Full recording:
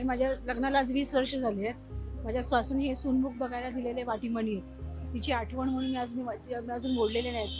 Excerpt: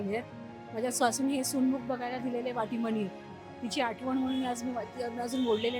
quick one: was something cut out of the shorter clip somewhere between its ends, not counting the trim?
no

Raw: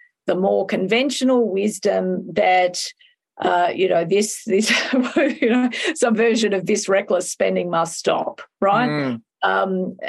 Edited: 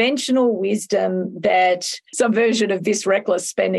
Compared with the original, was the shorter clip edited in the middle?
yes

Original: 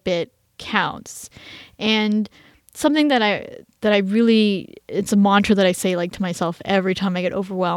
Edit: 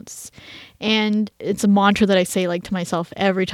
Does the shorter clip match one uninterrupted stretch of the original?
no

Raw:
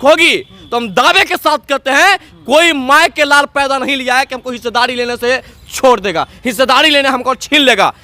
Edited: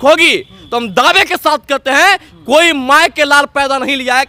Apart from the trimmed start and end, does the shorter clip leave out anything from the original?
no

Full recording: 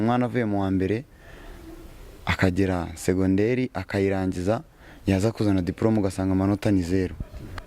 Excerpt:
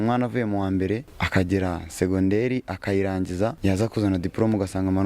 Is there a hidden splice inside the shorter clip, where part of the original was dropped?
yes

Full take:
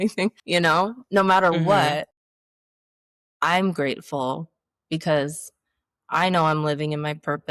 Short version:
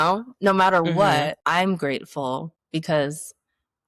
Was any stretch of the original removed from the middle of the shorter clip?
yes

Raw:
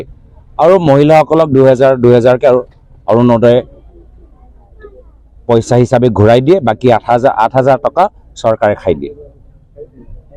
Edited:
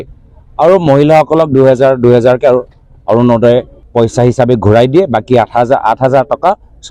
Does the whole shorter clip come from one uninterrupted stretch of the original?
no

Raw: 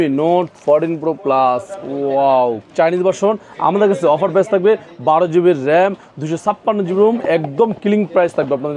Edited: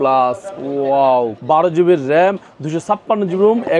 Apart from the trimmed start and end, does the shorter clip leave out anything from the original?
yes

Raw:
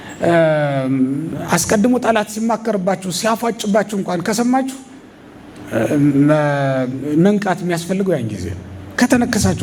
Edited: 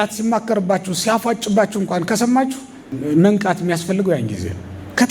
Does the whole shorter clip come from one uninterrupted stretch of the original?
no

